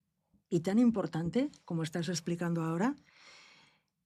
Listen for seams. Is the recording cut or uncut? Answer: uncut